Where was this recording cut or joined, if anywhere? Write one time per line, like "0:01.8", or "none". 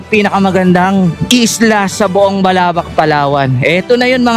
0:01.2

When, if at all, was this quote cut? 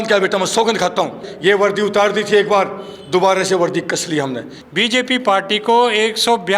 0:01.3
0:04.5

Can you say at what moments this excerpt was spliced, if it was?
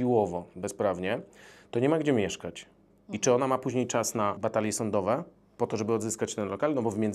0:04.4

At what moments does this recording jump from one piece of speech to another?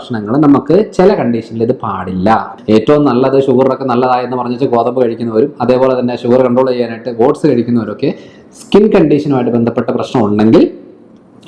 0:02.5

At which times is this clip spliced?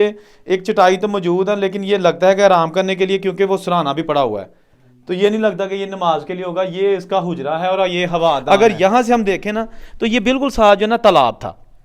0:08.4

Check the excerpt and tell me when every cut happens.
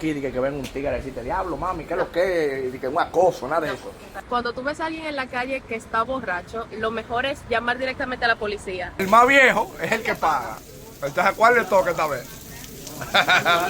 0:04.1
0:08.9

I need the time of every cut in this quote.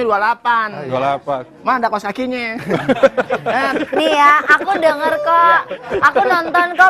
0:03.5

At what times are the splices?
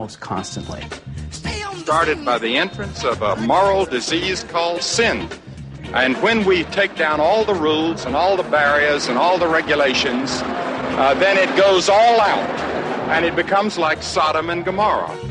none

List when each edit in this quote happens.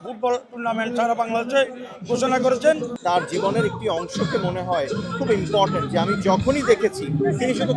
0:02.9

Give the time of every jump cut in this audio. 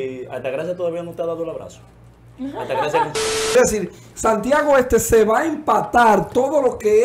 0:03.6

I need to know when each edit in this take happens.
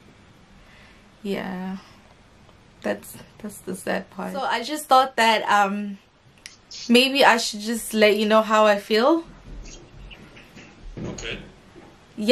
0:04.5

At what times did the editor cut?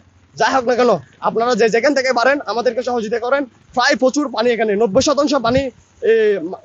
0:03.6

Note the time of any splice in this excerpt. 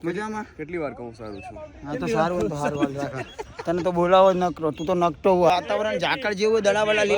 0:05.5

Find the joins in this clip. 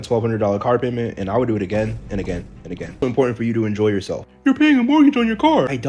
0:03.0

